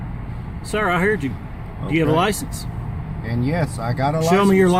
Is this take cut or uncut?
uncut